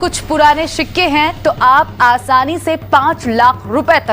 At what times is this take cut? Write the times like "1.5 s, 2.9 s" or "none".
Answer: 2.8 s